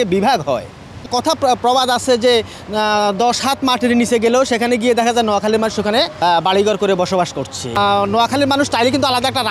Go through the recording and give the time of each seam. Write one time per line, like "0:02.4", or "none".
0:01.1
0:06.1
0:07.8